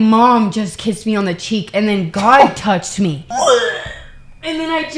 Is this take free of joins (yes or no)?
no